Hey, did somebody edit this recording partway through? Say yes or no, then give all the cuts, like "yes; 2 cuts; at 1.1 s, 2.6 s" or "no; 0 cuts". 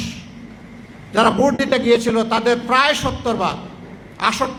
no; 0 cuts